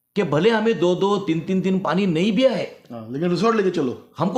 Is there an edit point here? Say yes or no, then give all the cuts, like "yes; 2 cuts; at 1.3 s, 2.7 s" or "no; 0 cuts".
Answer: no; 0 cuts